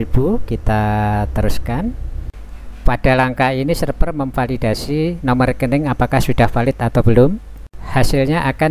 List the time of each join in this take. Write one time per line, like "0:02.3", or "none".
none